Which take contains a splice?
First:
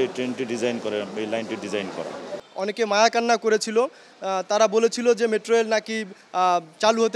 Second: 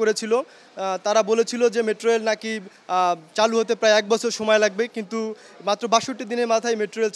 first; 1 cut; at 2.4 s

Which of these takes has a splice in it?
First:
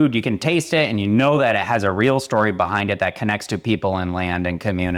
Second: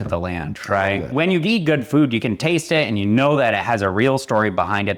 second; 1 cut; at 1.1 s

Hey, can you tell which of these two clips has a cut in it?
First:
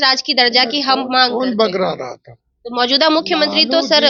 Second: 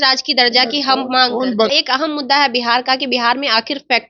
second; 1 cut; at 1.7 s

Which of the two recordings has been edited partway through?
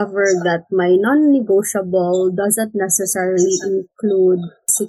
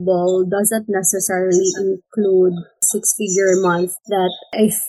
second; 1 cut; at 4.0 s

